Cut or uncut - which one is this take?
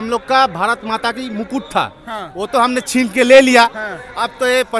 uncut